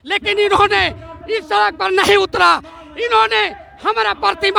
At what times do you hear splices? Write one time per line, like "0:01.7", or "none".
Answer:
none